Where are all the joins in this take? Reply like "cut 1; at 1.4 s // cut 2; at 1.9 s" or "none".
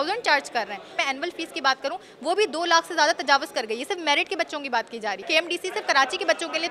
cut 1; at 0.9 s // cut 2; at 5.3 s